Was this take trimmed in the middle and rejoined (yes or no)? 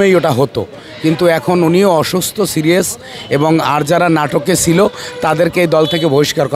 no